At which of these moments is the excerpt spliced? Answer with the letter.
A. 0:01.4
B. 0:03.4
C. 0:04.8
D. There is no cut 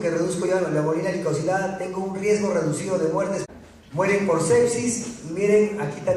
D